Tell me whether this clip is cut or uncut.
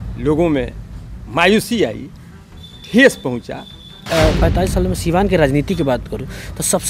cut